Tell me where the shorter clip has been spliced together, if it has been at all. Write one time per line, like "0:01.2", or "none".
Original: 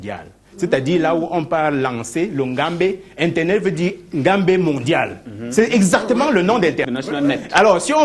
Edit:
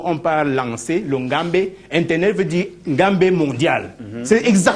none

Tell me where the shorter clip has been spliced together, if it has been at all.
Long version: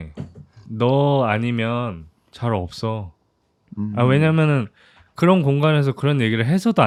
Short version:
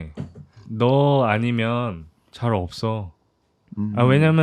none

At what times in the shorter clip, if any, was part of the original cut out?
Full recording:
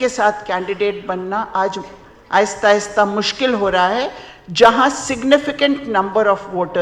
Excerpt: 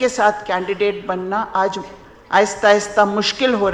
none

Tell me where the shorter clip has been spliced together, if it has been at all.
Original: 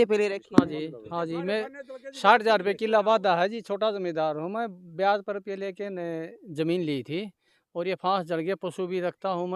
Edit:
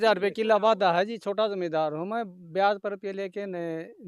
none

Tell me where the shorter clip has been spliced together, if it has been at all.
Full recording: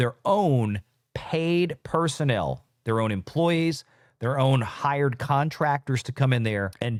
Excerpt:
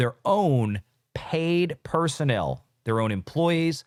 none

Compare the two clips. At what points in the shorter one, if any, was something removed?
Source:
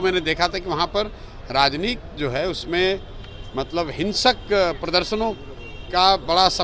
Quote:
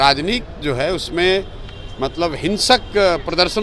none

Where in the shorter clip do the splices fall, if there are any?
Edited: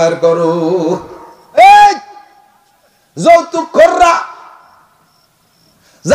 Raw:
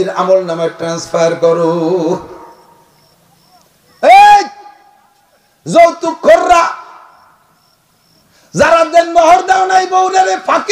0:01.6

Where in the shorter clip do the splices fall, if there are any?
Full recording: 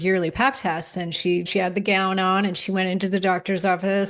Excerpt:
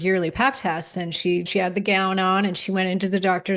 none

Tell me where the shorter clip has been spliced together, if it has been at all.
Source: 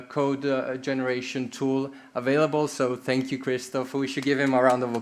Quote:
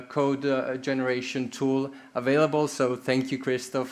none

